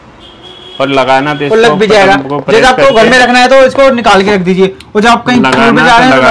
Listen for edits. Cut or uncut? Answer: uncut